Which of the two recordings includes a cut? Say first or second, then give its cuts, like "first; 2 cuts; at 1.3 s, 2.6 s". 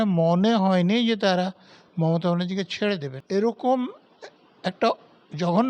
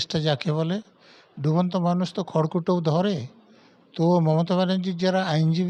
first; 1 cut; at 3.1 s